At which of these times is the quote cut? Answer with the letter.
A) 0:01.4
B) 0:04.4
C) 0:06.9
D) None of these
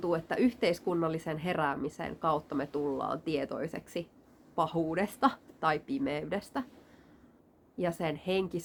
D